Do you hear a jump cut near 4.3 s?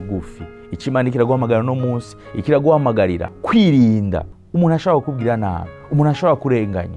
yes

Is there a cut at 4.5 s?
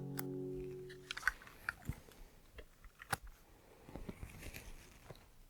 no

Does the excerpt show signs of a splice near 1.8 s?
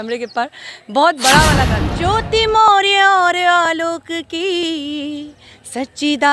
yes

